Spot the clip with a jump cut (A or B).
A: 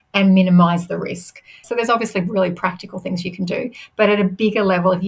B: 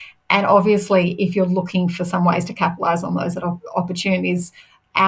A